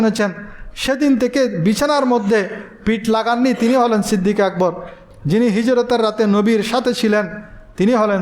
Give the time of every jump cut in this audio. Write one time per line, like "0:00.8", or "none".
0:05.0